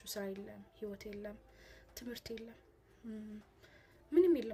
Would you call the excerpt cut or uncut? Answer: uncut